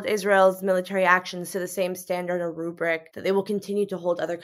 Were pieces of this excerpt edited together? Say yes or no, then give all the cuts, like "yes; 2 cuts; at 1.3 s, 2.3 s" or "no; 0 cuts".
yes; 1 cut; at 3.1 s